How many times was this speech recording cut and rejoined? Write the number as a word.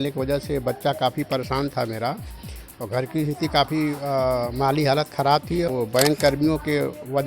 one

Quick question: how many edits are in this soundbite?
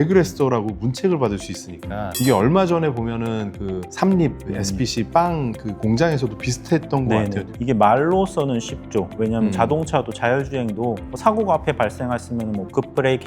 two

